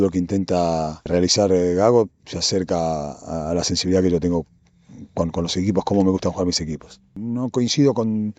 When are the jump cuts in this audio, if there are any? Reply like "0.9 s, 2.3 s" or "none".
1.1 s, 7.2 s